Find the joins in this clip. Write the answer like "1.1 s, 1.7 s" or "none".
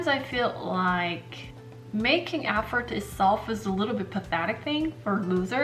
none